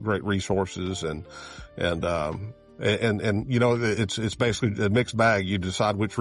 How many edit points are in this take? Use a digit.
0